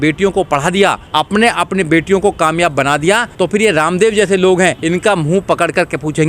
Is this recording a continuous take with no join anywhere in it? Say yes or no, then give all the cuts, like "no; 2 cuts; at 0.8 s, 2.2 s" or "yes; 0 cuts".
no; 3 cuts; at 1.0 s, 3.3 s, 4.8 s